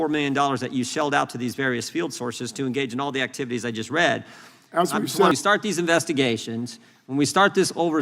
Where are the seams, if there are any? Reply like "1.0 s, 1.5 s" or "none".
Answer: 5.3 s